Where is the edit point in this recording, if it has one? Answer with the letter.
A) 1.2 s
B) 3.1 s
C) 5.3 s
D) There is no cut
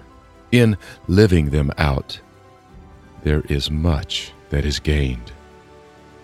C